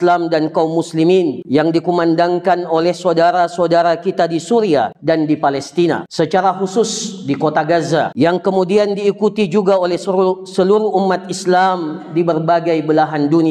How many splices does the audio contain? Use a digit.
4